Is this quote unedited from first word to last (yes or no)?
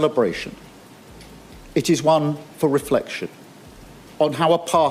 yes